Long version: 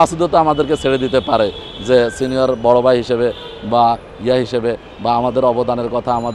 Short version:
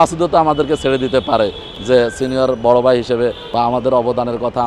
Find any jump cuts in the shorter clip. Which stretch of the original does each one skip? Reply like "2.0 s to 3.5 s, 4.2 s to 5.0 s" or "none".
3.4 s to 4.9 s